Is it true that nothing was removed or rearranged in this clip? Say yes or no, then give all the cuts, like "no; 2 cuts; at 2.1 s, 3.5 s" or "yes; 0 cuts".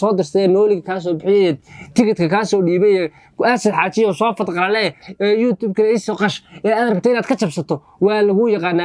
yes; 0 cuts